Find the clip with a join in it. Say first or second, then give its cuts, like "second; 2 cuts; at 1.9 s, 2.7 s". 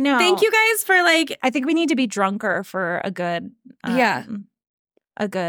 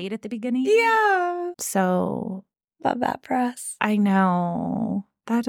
second; 1 cut; at 1.5 s